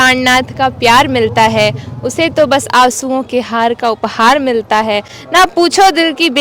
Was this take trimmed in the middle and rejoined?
no; 0 cuts

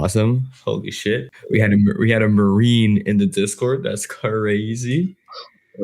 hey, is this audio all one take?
no; 1 cut; at 1.3 s

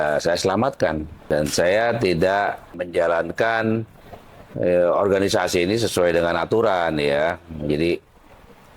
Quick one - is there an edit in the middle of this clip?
yes; 2 cuts; at 1.1 s, 2.9 s

